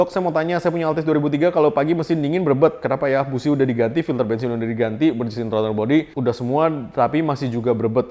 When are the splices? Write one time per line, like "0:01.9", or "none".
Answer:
none